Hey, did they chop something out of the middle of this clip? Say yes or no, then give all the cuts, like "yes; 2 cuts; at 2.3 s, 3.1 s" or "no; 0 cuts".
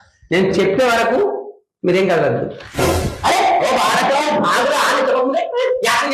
no; 0 cuts